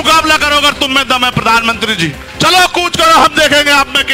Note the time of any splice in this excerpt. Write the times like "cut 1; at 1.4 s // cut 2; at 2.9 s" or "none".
cut 1; at 2.2 s